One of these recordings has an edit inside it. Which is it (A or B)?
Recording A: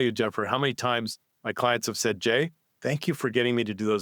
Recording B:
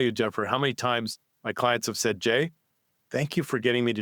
A